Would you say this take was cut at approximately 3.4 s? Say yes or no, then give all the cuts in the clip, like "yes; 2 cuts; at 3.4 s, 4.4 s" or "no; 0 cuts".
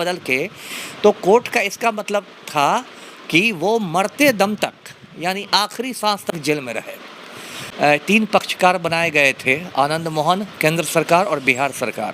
no; 1 cut; at 7.6 s